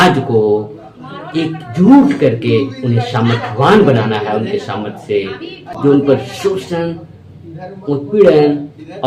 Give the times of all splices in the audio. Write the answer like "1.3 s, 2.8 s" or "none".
none